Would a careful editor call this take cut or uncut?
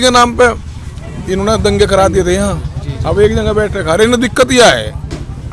uncut